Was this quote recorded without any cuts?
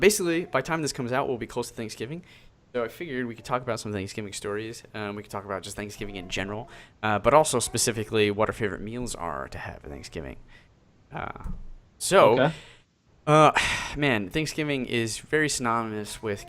no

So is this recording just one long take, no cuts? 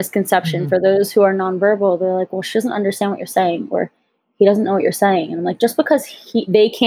yes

